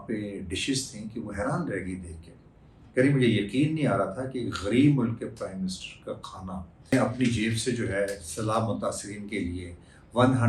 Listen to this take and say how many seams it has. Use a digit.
1